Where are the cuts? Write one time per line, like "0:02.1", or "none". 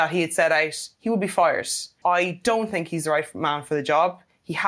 0:01.9